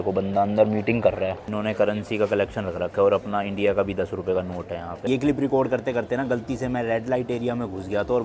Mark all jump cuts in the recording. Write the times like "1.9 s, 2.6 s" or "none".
1.4 s, 5.1 s